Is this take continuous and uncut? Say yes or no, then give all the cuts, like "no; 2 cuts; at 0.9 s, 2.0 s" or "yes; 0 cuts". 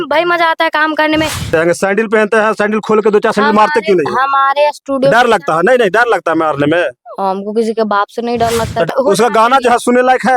no; 2 cuts; at 1.5 s, 8.9 s